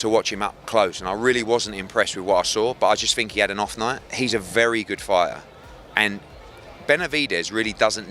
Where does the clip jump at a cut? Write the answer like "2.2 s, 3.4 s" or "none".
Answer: none